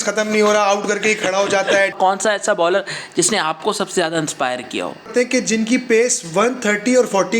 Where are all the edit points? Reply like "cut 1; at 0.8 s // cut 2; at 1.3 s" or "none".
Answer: cut 1; at 1.9 s // cut 2; at 5.1 s

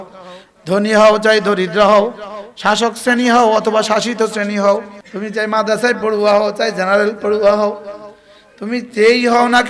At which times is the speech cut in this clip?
cut 1; at 5.0 s

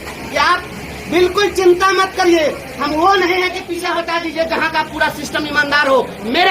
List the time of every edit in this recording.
cut 1; at 3.9 s

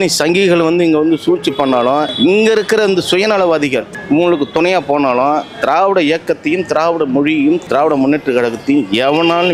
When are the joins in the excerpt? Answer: cut 1; at 2.1 s // cut 2; at 3.9 s // cut 3; at 7.6 s

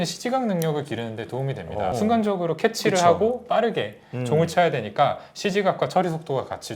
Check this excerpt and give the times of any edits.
cut 1; at 1.9 s

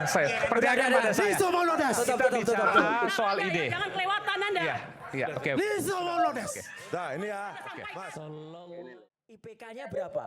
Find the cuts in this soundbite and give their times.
cut 1; at 9.1 s

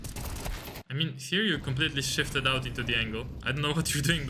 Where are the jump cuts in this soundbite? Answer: none

